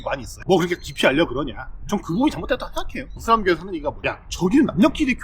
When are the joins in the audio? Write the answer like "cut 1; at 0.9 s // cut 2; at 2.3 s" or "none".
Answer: cut 1; at 1.8 s // cut 2; at 3.2 s